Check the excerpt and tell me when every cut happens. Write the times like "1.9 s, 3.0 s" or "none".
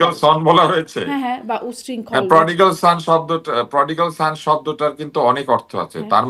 none